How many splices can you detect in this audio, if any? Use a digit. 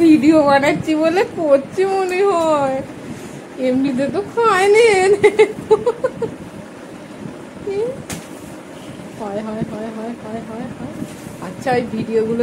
0